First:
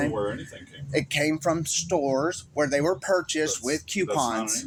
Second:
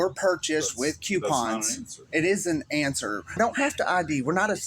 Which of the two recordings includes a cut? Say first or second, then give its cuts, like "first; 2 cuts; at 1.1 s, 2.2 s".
second; 1 cut; at 3.4 s